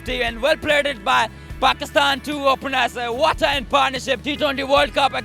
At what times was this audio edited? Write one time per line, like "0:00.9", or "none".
none

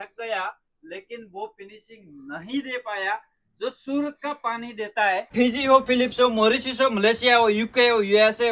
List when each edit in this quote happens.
0:05.3

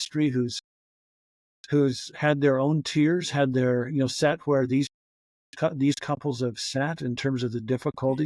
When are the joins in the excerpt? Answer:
none

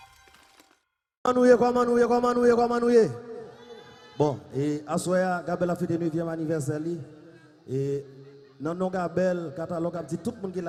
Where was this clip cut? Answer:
none

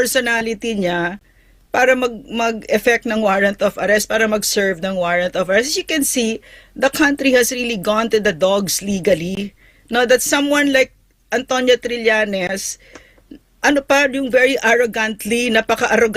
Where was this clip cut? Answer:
none

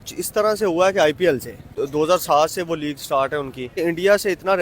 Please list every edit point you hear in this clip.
0:01.8
0:03.8

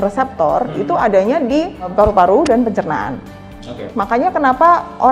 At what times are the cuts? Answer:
0:01.9
0:03.9

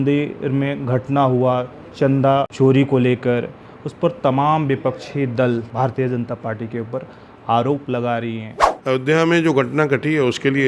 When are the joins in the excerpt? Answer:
0:02.5
0:05.7
0:08.7

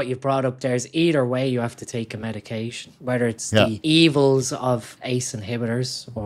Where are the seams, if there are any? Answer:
0:02.9
0:03.8
0:04.9

